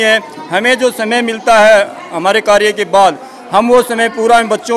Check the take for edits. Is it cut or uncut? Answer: uncut